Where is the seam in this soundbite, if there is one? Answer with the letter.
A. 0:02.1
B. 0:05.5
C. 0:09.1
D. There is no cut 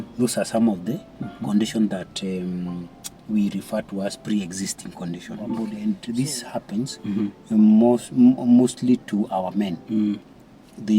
B